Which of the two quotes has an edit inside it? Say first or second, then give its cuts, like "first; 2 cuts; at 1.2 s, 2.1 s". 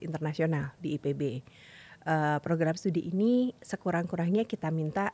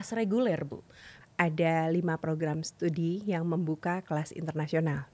second; 1 cut; at 1.1 s